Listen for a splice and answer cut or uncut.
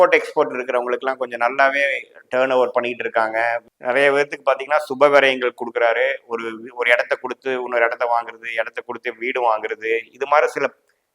cut